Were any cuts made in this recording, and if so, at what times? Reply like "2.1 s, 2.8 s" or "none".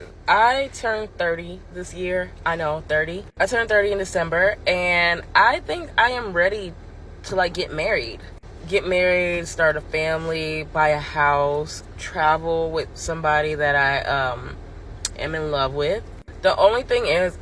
none